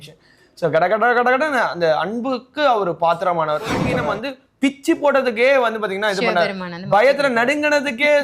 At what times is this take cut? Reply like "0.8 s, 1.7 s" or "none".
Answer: 3.9 s